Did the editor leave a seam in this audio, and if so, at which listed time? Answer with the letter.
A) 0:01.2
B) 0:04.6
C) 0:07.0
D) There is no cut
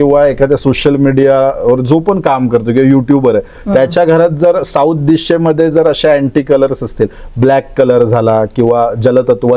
D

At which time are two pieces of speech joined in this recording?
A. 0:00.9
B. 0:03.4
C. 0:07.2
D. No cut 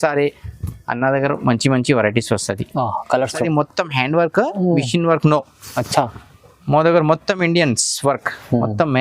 B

